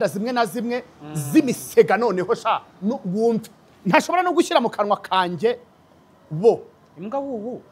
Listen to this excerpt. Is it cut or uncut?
uncut